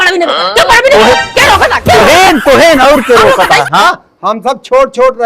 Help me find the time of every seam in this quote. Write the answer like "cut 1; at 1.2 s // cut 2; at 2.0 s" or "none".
cut 1; at 3.8 s

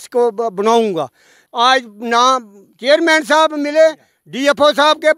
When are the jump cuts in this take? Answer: cut 1; at 1.4 s

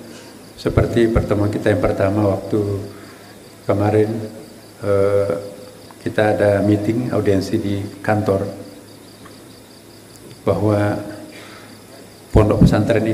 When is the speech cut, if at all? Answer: none

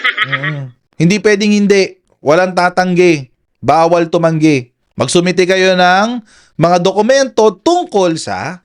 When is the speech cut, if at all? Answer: none

